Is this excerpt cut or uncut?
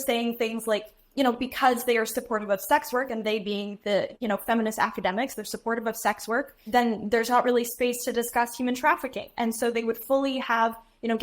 cut